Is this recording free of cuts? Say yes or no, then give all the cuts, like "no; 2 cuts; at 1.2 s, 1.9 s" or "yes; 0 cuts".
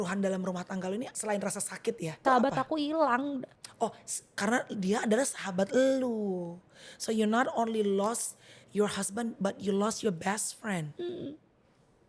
no; 3 cuts; at 1.1 s, 2.2 s, 3.6 s